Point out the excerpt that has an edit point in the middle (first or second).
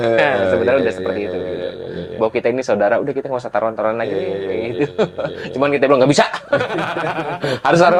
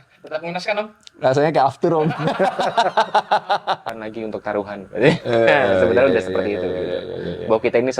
second